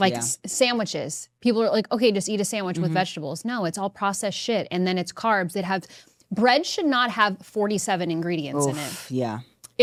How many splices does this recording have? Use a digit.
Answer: 0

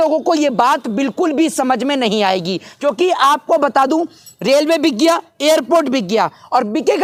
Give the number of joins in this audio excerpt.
0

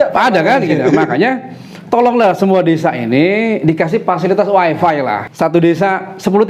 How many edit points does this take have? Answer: 1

